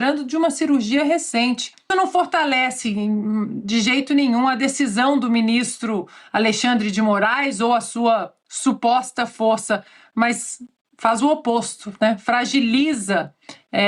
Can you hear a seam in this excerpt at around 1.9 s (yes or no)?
yes